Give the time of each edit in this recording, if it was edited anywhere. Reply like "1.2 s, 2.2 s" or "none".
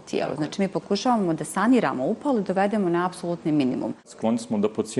4.1 s